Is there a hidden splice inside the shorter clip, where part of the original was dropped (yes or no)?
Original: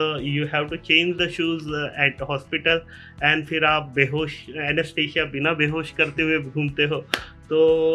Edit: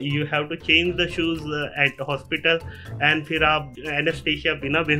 yes